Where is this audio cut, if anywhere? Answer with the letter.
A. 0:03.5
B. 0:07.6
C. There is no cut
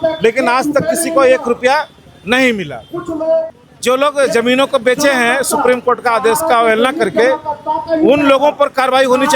A